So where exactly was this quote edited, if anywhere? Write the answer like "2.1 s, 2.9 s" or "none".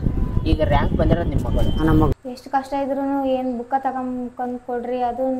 2.1 s